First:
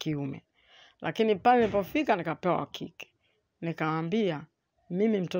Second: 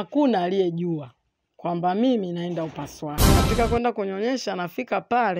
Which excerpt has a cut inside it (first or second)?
second